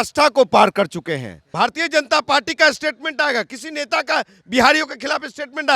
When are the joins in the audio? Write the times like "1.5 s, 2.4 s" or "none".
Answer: 1.4 s